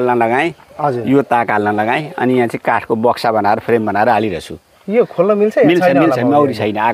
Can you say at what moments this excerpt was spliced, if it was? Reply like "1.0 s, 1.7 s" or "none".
none